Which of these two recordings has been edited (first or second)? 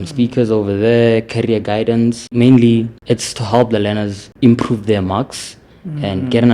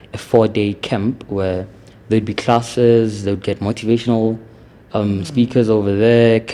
first